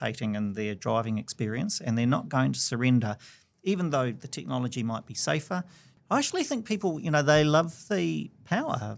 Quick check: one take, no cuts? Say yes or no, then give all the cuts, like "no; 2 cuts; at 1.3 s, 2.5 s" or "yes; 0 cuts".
no; 1 cut; at 5.9 s